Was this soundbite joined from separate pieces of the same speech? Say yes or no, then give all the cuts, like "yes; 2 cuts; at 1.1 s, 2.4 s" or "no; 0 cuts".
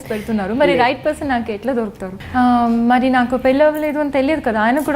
yes; 1 cut; at 2.1 s